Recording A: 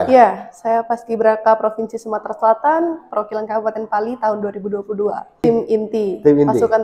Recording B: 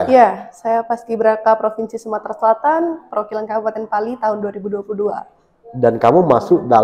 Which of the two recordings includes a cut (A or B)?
A